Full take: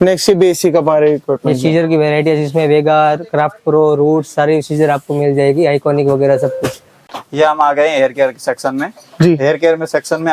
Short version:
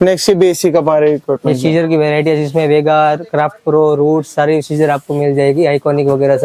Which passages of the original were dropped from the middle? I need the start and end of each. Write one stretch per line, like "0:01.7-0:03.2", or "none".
none

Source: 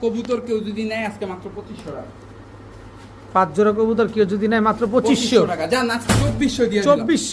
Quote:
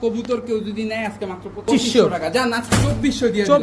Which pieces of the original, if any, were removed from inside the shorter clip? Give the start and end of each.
0:01.7-0:05.0

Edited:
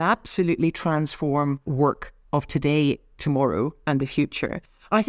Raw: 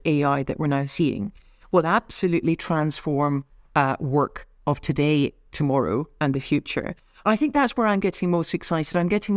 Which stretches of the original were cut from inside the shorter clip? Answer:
0:03.5-0:04.0

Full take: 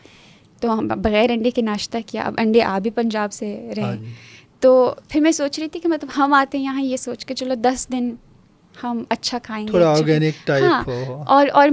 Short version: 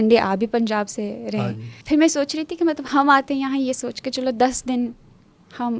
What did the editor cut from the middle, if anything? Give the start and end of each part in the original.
0:04.2-0:05.0

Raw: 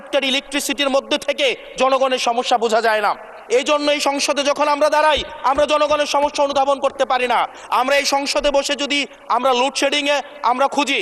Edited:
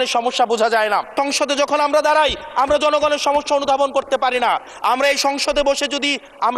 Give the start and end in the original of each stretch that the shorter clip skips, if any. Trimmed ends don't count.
0:03.2-0:04.0

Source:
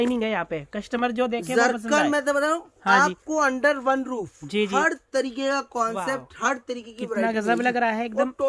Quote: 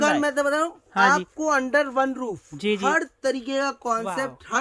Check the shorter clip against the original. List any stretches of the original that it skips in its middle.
none

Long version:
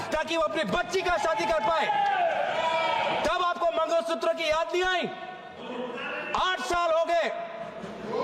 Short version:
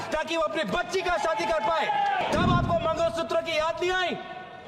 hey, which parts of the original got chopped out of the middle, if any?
0:02.2-0:03.1

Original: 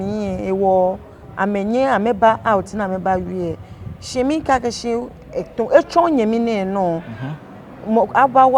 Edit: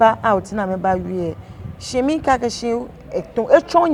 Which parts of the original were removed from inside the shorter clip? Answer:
none

